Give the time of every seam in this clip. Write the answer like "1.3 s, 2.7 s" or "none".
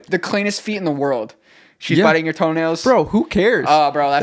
none